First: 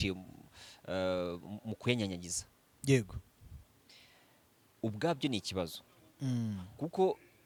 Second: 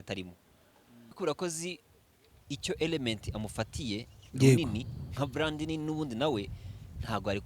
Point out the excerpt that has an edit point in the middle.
second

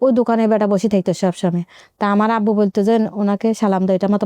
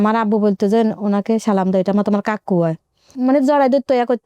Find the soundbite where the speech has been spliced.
second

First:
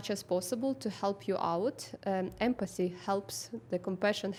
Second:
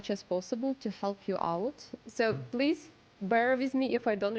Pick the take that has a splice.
second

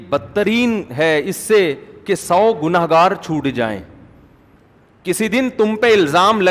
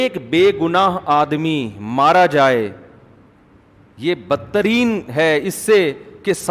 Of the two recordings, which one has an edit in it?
first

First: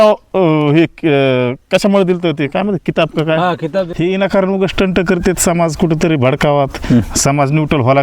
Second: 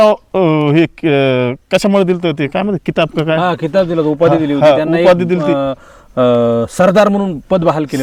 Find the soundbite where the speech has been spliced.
first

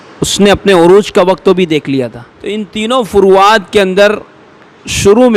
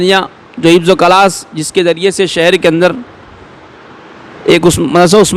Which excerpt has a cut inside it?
first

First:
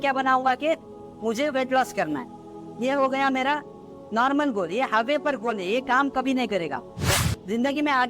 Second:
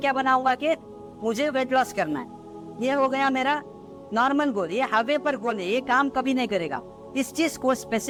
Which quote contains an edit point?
first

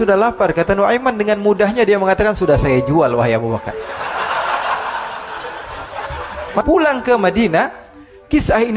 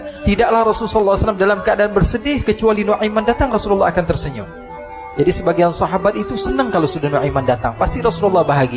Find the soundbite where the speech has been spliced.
first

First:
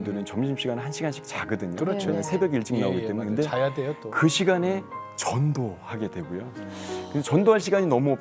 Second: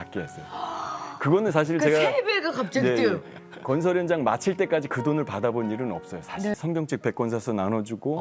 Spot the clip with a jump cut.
second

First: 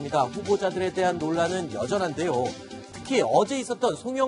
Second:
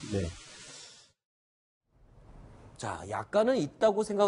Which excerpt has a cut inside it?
second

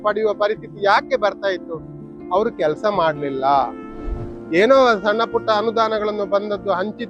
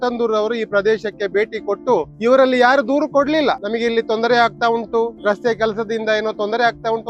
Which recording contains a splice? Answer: second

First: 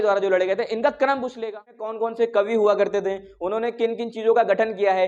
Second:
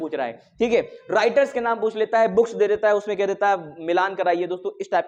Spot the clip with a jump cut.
first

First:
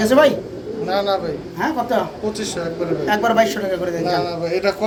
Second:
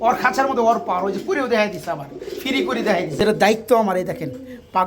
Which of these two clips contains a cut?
second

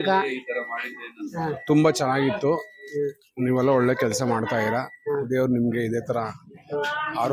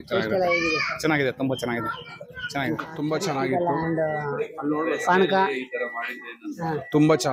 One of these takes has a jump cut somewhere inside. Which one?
second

